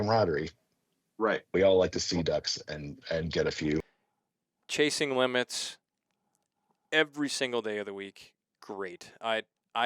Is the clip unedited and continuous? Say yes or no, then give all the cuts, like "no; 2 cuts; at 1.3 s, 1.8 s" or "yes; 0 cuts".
no; 1 cut; at 4.0 s